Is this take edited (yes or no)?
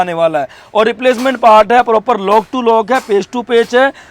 no